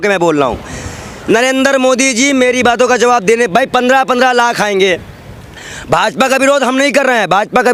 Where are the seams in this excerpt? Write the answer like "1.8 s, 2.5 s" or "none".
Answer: none